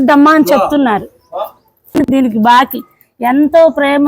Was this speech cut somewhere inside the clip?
yes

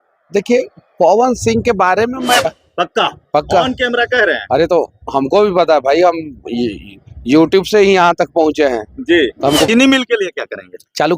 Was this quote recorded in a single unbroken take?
no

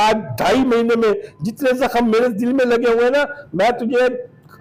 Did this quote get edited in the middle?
no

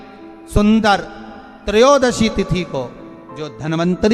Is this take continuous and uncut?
yes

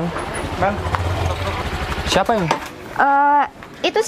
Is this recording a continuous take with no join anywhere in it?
no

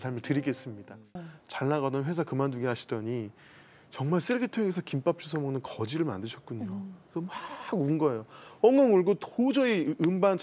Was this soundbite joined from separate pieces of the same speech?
yes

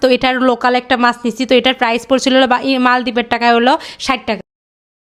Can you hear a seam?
no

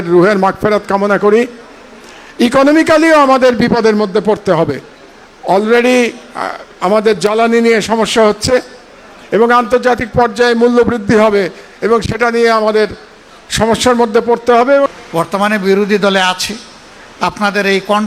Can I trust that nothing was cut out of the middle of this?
no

